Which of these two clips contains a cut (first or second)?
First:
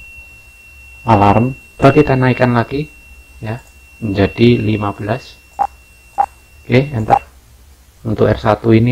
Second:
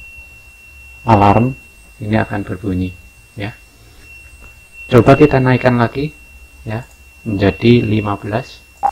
first